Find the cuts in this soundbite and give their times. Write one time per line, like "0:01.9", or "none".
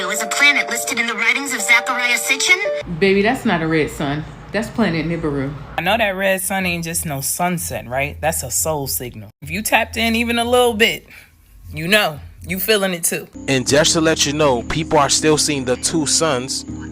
0:02.9
0:05.8
0:13.3